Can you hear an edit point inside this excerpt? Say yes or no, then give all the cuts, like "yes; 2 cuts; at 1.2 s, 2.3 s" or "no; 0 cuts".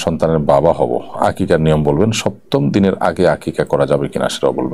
no; 0 cuts